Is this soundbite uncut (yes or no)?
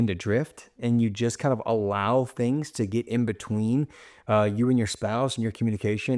yes